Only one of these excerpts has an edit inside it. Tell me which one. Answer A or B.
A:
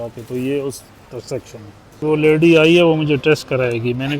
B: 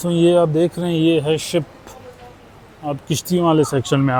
A